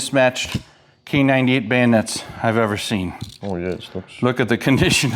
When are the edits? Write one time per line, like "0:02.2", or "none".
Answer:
none